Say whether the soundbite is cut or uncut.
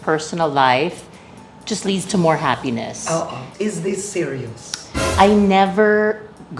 cut